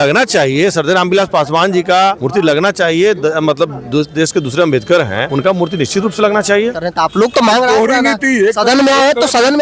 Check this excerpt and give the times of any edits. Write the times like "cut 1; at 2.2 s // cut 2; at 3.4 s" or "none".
cut 1; at 2.2 s // cut 2; at 5.2 s // cut 3; at 6.7 s